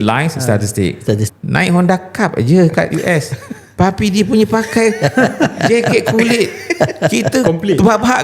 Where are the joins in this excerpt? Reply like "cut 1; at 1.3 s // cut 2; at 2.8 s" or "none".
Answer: cut 1; at 1.3 s